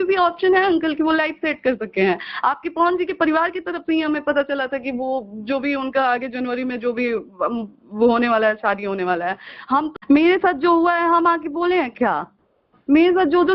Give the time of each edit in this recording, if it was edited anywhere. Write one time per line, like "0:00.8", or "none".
0:10.0